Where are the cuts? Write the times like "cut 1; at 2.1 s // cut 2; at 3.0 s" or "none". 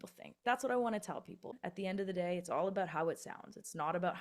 cut 1; at 1.5 s